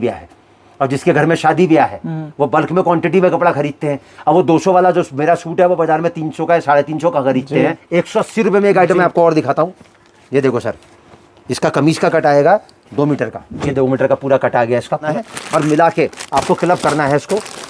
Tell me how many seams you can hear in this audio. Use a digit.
2